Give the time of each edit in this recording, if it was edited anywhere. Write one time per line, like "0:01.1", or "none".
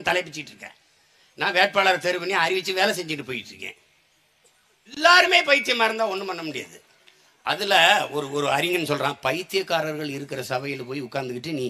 0:04.9